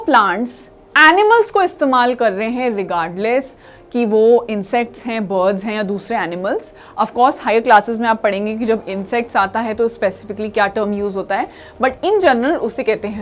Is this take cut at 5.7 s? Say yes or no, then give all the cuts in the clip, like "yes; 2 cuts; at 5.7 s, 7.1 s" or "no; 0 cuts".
no; 0 cuts